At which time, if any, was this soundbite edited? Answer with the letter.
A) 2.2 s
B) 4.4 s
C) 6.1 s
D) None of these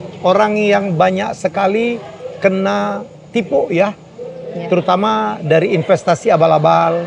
D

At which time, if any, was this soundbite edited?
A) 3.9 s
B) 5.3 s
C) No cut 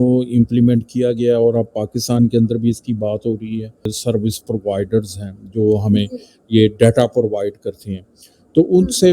A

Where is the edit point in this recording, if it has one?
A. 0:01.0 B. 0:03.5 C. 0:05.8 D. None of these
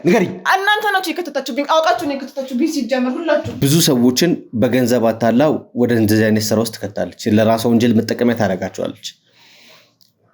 B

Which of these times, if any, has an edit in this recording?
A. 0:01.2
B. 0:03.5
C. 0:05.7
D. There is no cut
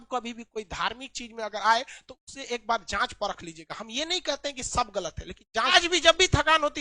C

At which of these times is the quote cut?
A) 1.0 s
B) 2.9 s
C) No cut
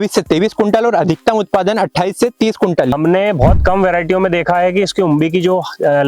B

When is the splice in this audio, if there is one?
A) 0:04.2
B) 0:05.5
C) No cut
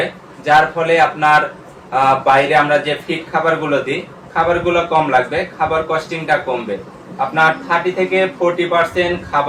C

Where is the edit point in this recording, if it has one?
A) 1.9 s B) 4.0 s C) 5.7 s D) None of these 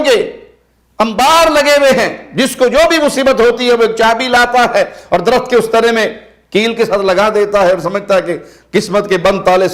D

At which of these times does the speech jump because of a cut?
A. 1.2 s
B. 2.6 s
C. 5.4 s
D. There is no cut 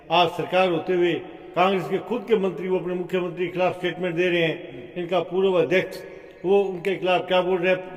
D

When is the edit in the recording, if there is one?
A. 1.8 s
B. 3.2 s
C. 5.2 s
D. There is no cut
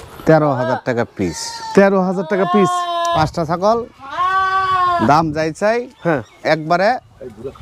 B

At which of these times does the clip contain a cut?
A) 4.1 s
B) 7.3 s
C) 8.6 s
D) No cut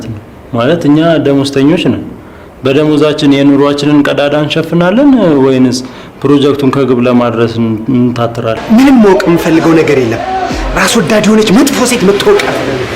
C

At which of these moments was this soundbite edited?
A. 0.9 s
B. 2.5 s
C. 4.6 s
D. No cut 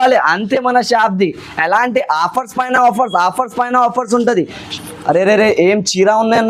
C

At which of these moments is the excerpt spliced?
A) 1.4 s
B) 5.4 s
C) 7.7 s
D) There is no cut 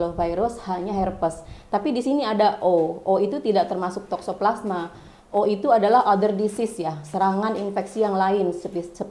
D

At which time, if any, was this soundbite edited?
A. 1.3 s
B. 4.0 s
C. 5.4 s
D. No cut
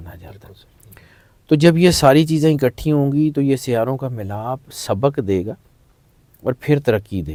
D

